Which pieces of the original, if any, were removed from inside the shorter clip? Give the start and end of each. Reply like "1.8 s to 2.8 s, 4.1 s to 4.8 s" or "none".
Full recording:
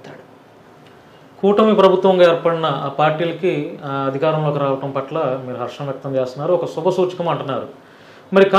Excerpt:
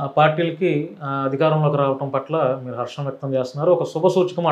none